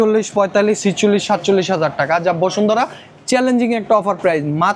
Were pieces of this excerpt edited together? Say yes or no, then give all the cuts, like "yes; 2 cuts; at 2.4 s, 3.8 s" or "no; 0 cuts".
no; 0 cuts